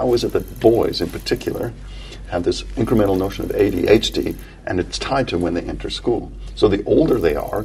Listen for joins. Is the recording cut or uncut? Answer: uncut